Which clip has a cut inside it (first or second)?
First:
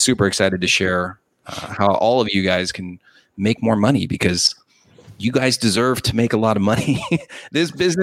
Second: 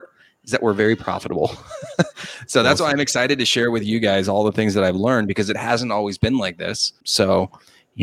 second